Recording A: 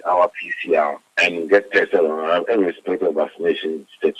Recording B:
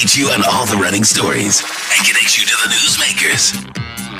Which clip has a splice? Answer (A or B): A